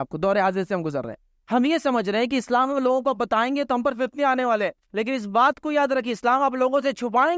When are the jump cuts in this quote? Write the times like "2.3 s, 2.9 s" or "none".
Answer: none